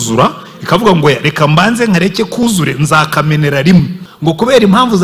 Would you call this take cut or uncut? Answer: cut